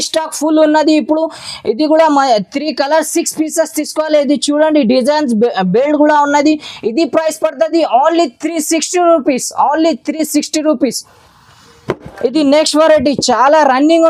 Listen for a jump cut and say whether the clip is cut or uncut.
uncut